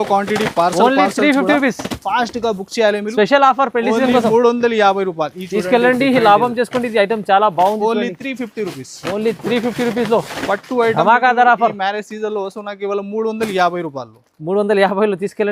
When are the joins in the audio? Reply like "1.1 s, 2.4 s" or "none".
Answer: none